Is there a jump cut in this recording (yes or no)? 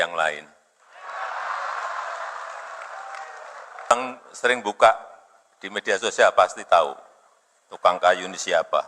yes